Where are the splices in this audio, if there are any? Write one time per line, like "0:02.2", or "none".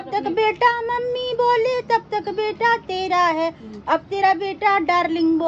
none